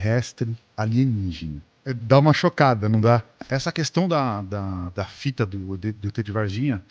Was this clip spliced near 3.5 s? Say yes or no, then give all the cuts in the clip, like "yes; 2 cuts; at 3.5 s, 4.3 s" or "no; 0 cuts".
yes; 2 cuts; at 2.0 s, 3.5 s